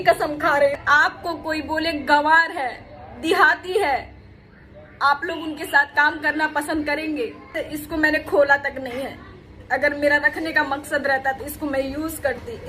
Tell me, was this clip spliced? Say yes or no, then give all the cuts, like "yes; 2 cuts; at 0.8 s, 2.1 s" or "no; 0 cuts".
yes; 2 cuts; at 0.8 s, 7.6 s